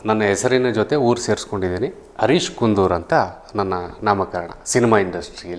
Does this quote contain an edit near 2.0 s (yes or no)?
no